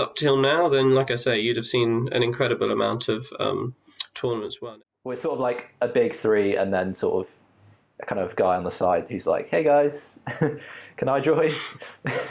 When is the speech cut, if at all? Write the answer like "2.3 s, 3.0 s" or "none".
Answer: 4.6 s